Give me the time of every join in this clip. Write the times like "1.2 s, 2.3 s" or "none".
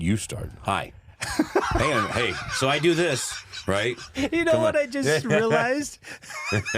none